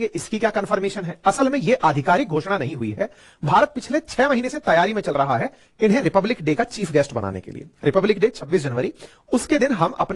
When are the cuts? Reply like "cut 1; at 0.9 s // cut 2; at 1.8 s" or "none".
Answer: none